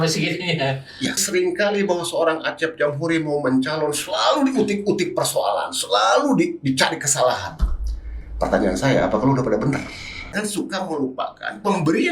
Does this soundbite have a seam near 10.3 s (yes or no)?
yes